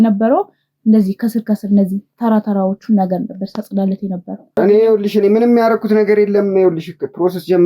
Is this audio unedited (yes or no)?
no